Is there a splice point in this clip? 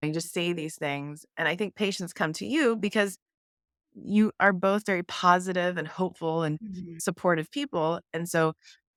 no; 0 cuts

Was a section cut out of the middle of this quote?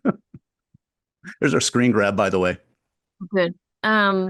no; 0 cuts

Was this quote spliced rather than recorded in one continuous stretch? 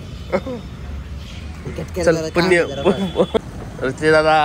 yes; 1 cut; at 3.4 s

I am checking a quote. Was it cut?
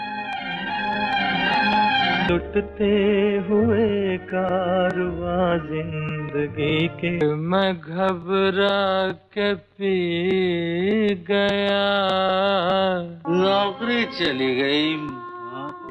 yes; 1 cut; at 2.3 s

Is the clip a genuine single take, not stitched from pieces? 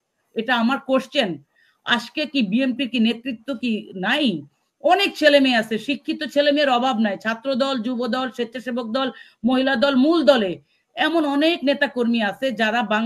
yes; 0 cuts

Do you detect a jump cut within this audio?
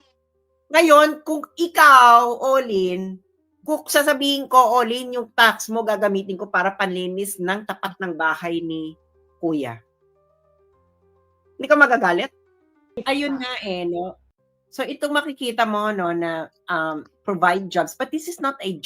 yes; 1 cut; at 13.0 s

